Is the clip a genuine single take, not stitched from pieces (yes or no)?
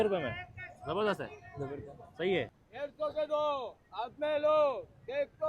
no